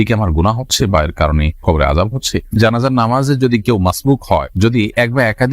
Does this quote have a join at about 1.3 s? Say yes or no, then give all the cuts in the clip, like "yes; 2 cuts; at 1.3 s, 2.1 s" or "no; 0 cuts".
no; 1 cut; at 2.6 s